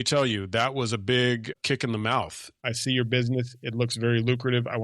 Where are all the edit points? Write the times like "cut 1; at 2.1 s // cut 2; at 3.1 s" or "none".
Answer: cut 1; at 2.5 s